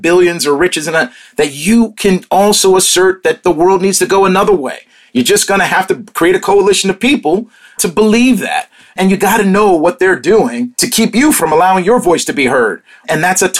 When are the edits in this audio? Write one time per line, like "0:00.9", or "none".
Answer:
none